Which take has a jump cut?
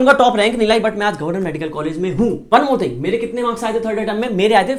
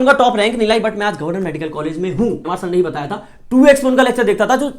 second; 1 cut; at 2.4 s

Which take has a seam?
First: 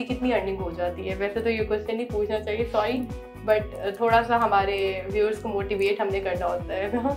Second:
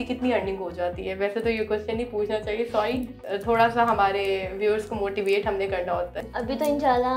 second; 2 cuts; at 3.2 s, 6.1 s

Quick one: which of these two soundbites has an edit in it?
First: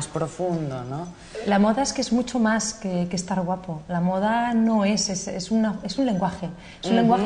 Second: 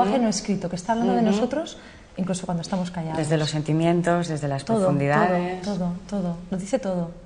first; 1 cut; at 5.0 s

